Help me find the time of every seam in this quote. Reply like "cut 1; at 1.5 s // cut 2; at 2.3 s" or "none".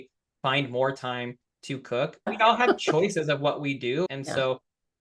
cut 1; at 2.3 s // cut 2; at 4.1 s